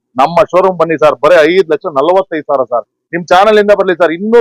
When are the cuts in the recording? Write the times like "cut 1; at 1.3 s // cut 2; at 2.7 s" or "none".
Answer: none